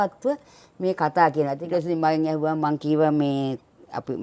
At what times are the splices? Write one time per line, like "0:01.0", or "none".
0:01.6